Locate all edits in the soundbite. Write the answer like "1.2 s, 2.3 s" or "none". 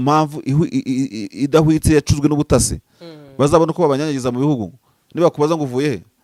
none